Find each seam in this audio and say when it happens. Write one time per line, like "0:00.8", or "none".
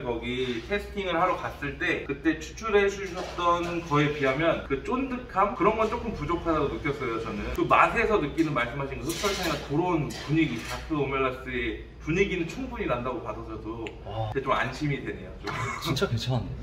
none